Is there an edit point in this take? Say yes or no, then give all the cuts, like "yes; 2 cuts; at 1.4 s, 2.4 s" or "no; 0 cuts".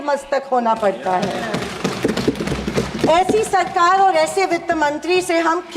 no; 0 cuts